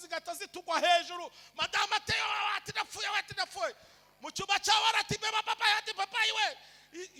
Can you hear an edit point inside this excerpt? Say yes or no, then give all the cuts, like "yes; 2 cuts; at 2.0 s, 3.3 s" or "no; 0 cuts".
no; 0 cuts